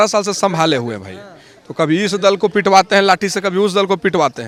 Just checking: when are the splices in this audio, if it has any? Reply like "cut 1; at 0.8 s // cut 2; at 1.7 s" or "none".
none